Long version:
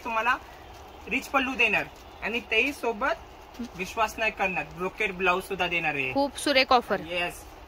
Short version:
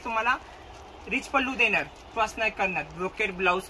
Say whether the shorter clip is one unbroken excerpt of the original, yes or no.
no